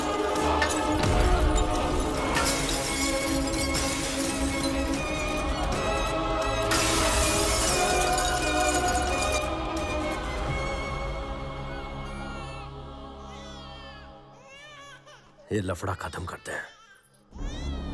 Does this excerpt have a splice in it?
yes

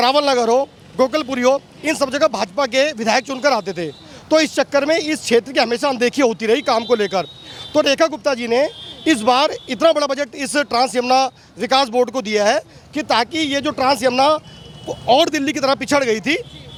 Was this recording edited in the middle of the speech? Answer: no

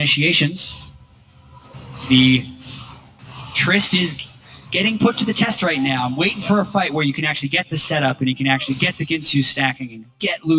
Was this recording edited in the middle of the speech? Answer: no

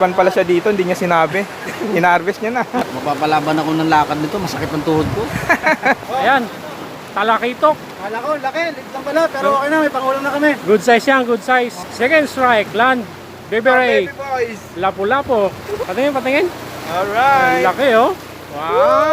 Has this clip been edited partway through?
yes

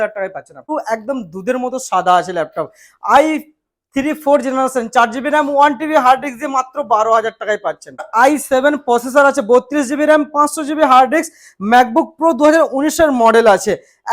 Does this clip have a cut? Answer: yes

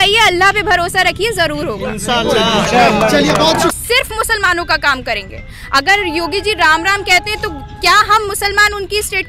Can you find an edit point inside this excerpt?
yes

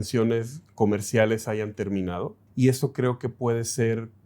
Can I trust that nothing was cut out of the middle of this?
no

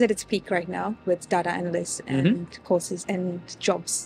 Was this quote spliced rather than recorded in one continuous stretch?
no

